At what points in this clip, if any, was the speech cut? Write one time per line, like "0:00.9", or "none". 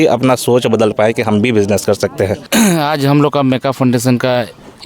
0:02.5